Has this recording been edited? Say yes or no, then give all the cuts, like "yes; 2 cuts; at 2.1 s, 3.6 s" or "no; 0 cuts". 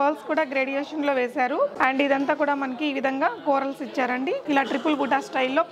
yes; 2 cuts; at 1.7 s, 4.4 s